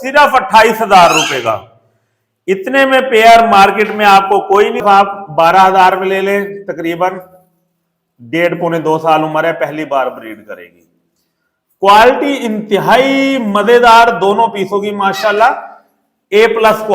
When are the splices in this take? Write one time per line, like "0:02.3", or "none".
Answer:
0:04.8